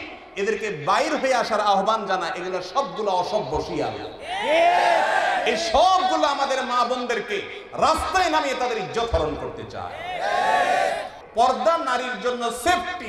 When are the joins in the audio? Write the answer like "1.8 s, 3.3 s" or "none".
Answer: 11.1 s